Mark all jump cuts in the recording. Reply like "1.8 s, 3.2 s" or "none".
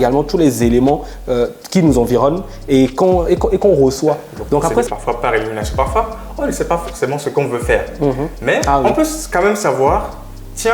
4.9 s